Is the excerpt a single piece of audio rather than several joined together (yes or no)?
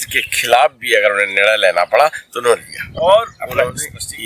no